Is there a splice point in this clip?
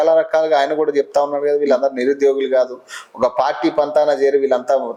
no; 0 cuts

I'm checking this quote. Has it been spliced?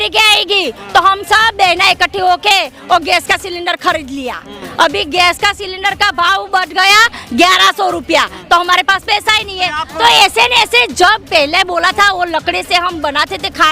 no; 0 cuts

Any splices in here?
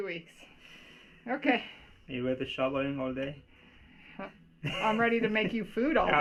no; 0 cuts

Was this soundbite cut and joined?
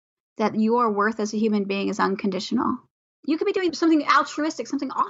yes; 1 cut; at 3.4 s

